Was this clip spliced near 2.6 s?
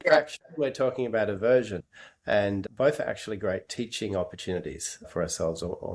no; 0 cuts

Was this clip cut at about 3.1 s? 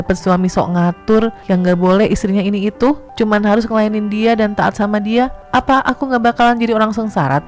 yes; 3 cuts; at 1.4 s, 3.1 s, 5.4 s

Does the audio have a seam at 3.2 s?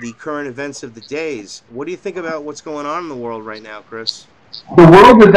no; 0 cuts

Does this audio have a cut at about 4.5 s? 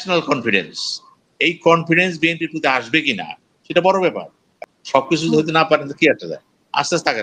yes; 1 cut; at 4.5 s

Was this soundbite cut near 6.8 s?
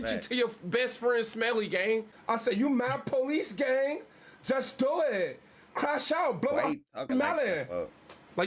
no; 1 cut; at 2.1 s

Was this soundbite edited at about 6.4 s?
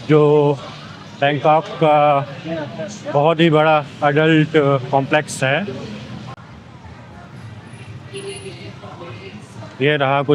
yes; 1 cut; at 6.4 s

